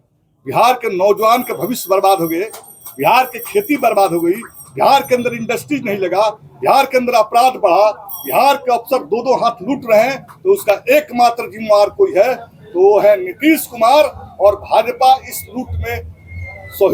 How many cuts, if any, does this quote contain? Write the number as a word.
zero